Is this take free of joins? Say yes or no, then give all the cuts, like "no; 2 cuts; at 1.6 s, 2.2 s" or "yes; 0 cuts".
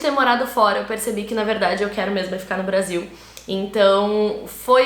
yes; 0 cuts